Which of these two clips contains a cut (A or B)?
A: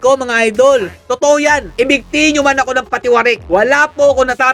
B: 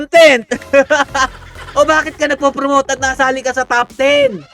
B